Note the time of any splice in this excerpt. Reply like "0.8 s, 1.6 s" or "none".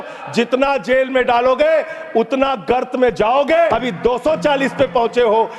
3.7 s